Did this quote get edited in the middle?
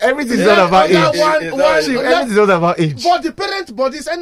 no; 0 cuts

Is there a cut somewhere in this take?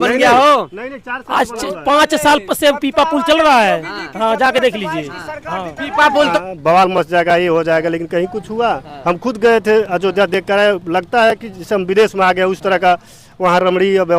yes; 1 cut; at 6.3 s

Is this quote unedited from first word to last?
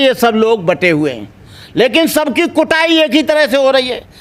yes; 0 cuts

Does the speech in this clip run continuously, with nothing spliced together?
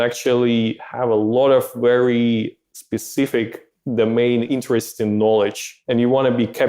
no; 1 cut; at 4.5 s

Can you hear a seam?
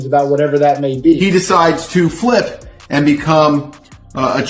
yes; 1 cut; at 1.2 s

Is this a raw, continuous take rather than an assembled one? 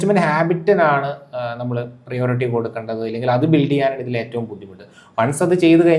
yes; 0 cuts

